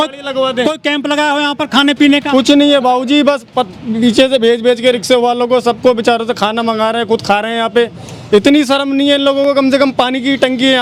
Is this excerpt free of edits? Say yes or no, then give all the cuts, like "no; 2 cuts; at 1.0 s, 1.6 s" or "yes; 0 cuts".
yes; 0 cuts